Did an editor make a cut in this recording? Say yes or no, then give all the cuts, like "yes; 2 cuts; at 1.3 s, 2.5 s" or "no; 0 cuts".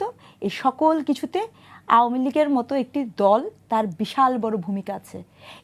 no; 0 cuts